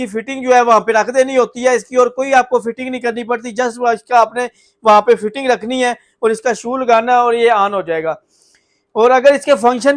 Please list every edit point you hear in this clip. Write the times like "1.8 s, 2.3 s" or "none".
none

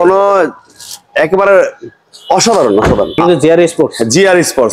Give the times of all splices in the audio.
3.2 s

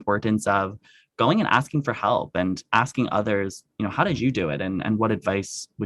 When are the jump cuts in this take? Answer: none

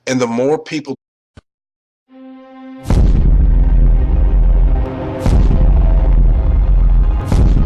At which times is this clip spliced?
none

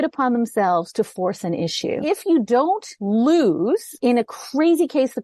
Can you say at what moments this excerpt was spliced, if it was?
2.0 s, 2.9 s, 3.9 s

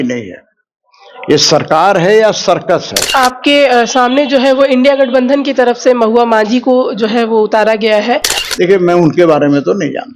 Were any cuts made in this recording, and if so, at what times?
3.0 s, 8.4 s

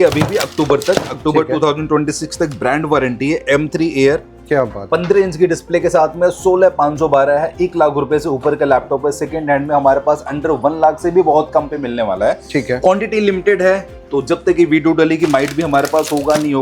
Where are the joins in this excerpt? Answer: none

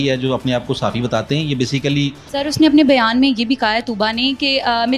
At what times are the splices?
2.2 s

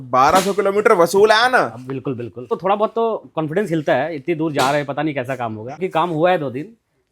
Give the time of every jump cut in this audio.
2.6 s, 5.8 s

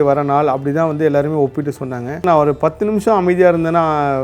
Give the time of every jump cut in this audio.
2.2 s

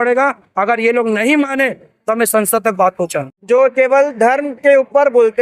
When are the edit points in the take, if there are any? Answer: 3.3 s

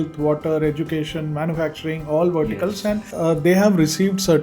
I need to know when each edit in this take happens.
3.1 s

